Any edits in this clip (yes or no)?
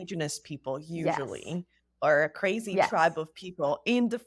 no